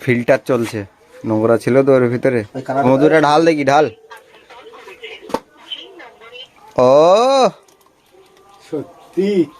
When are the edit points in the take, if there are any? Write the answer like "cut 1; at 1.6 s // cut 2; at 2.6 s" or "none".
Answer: cut 1; at 2.9 s